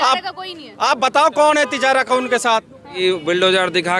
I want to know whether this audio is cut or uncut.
cut